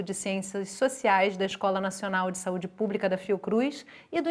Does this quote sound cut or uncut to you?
uncut